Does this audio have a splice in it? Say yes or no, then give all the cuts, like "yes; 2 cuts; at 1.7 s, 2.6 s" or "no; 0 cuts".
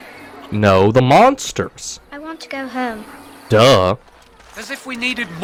no; 0 cuts